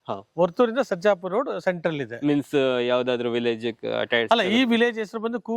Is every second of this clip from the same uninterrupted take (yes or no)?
yes